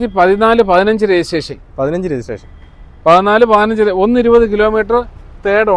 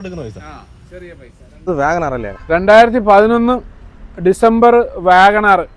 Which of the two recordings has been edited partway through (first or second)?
second